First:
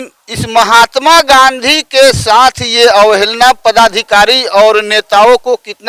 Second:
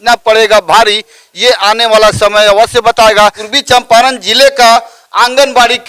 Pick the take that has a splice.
second; 1 cut; at 3.5 s

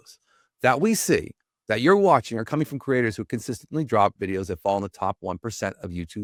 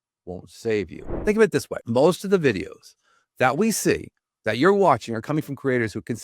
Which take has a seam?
second; 2 cuts; at 1.0 s, 1.8 s

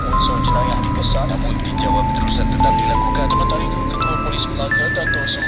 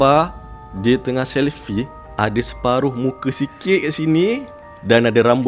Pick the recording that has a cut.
second; 1 cut; at 2.0 s

